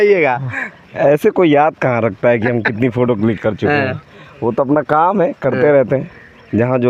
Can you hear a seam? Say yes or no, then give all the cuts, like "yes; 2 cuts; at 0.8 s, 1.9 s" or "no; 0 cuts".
no; 0 cuts